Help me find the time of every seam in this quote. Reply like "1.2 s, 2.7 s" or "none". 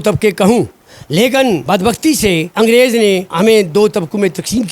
1.6 s, 2.5 s, 3.3 s